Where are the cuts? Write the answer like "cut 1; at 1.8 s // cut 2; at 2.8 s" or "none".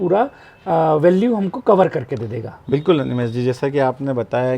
none

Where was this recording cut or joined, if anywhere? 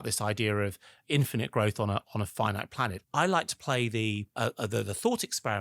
cut 1; at 0.9 s // cut 2; at 3.0 s // cut 3; at 4.3 s

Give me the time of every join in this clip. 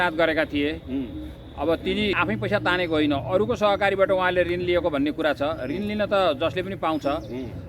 cut 1; at 2.2 s

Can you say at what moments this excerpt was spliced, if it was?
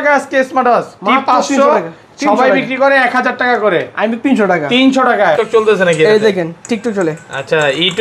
cut 1; at 5.4 s

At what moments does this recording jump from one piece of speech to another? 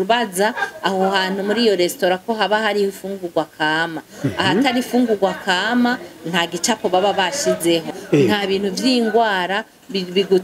cut 1; at 7.9 s

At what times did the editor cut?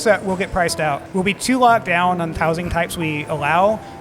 cut 1; at 1.0 s // cut 2; at 2.3 s

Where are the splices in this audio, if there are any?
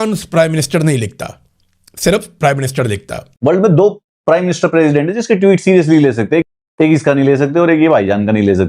cut 1; at 3.4 s

